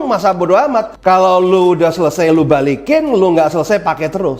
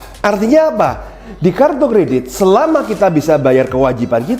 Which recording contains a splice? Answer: first; 1 cut; at 0.9 s

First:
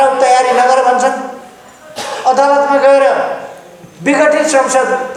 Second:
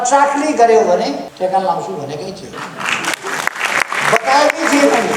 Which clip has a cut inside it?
second; 2 cuts; at 1.3 s, 2.5 s

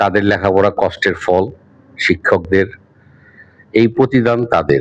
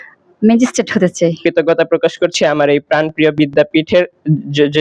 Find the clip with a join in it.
second; 1 cut; at 1.4 s

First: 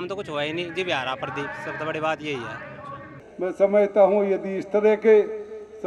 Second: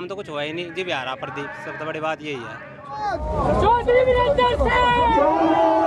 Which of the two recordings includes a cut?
first; 1 cut; at 2.9 s

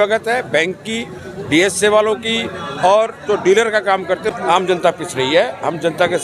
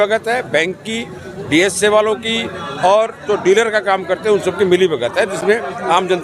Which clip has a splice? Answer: first; 1 cut; at 4.2 s

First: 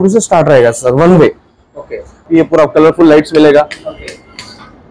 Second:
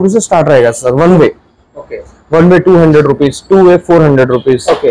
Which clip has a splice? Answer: first; 1 cut; at 2.2 s

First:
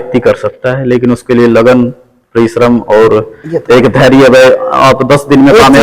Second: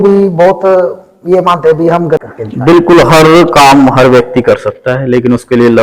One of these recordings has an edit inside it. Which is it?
second; 1 cut; at 2.2 s

